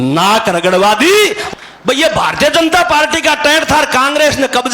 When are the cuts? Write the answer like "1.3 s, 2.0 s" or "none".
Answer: 1.4 s

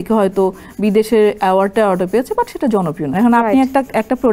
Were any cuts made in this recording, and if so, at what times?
3.1 s

